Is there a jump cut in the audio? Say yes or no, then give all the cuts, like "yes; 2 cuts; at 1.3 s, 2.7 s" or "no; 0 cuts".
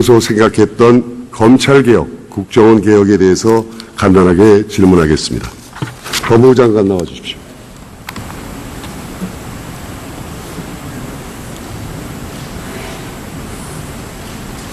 yes; 1 cut; at 12.8 s